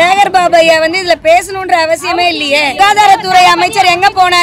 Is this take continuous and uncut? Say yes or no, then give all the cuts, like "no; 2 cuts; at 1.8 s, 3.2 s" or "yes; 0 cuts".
no; 1 cut; at 2.7 s